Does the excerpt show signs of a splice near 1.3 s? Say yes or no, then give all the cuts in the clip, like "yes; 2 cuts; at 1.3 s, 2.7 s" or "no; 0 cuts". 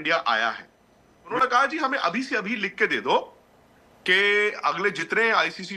yes; 1 cut; at 1.3 s